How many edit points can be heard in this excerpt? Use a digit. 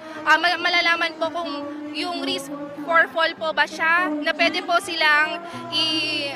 0